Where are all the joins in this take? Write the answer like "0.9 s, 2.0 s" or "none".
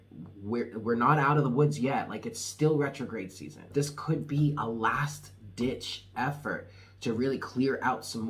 3.7 s